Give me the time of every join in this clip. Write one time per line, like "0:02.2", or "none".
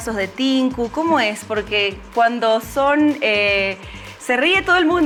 none